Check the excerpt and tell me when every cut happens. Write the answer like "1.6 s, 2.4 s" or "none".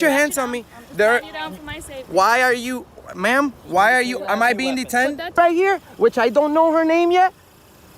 5.4 s